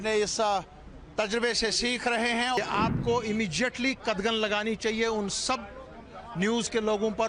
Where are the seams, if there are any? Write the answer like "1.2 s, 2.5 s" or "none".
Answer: 2.6 s